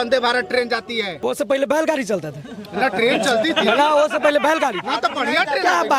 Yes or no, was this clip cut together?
yes